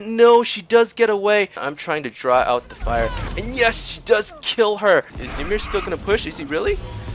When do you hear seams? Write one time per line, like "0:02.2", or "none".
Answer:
0:01.6
0:05.2